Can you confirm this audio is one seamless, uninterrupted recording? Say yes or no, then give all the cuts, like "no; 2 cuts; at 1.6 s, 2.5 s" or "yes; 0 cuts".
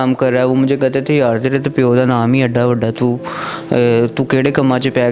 yes; 0 cuts